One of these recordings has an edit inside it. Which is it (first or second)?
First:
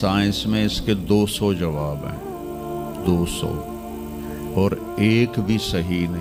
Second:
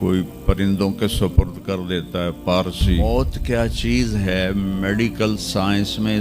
second